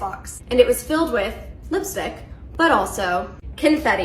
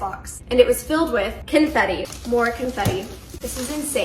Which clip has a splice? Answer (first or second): second